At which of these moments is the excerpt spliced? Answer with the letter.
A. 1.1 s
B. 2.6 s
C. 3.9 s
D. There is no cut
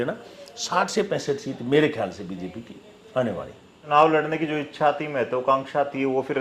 C